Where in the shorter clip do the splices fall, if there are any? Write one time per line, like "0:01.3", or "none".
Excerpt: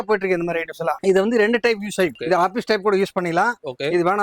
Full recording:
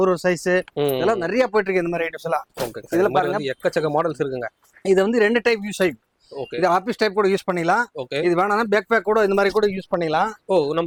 0:01.0
0:02.2